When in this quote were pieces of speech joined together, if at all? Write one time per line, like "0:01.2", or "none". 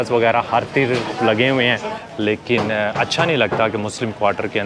0:01.9